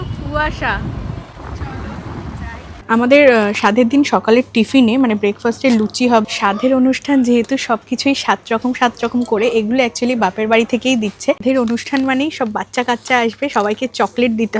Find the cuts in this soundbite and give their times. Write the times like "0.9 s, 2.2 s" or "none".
1.4 s, 2.7 s, 6.2 s, 11.4 s